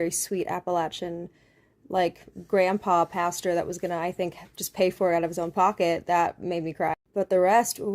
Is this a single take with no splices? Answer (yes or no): yes